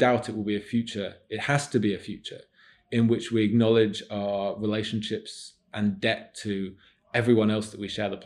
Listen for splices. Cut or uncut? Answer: uncut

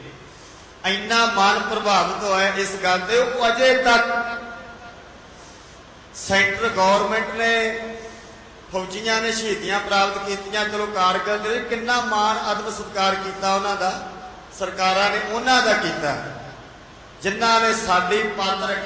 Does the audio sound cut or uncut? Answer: uncut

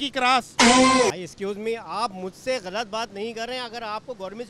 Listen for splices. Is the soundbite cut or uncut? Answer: uncut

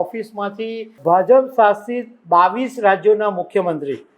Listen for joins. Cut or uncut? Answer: cut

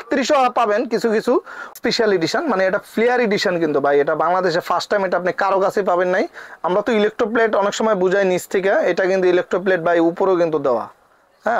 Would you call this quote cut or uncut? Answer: cut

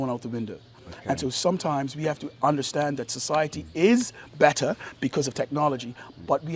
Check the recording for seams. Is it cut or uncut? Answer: uncut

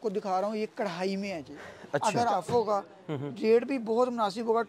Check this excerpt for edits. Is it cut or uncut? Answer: cut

